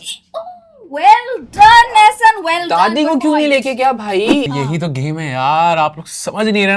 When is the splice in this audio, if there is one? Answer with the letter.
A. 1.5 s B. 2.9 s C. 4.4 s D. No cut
C